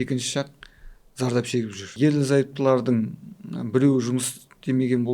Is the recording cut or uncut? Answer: uncut